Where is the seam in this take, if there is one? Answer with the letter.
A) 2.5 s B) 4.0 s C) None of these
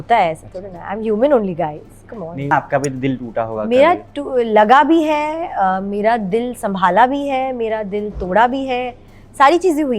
A